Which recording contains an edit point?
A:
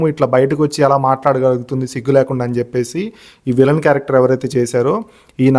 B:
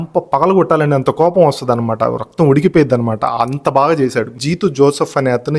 B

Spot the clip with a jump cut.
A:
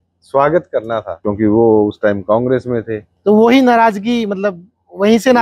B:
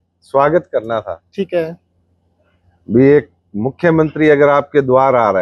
A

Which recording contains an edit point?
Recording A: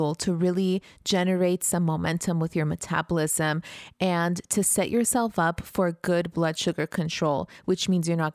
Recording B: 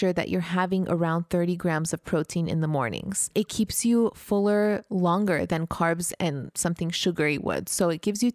B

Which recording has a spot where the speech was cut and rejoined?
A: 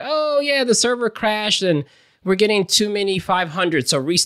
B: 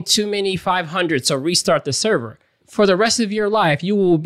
B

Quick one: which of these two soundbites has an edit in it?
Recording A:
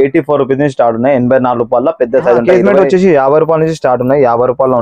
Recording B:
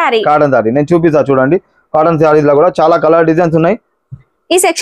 A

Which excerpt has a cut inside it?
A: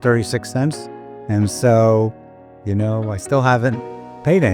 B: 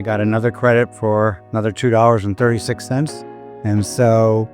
B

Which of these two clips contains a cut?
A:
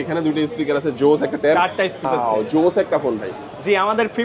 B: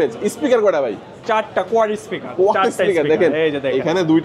A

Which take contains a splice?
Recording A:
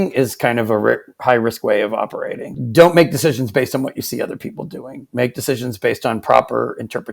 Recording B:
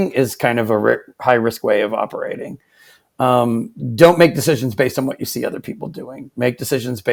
A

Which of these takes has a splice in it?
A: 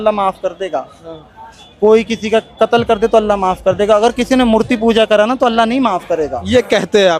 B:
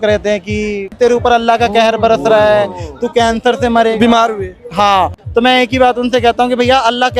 B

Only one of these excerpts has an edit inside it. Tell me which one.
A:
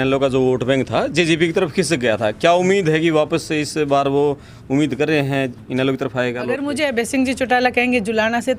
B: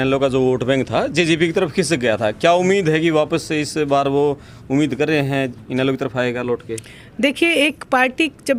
A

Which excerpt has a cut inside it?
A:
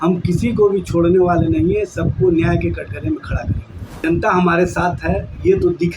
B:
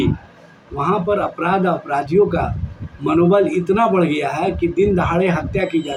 A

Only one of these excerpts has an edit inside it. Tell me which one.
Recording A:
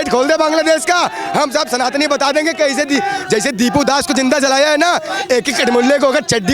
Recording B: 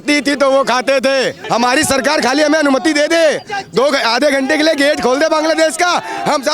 B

